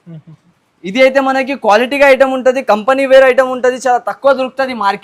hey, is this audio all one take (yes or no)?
yes